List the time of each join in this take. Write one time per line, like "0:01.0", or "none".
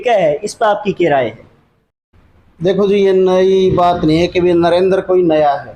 0:01.9